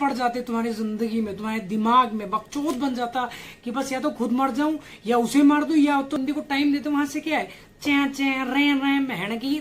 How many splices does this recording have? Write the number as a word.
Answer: one